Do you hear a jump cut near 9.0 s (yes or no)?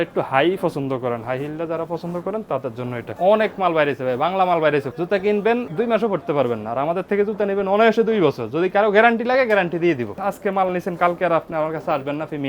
no